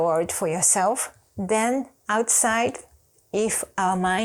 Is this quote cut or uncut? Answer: uncut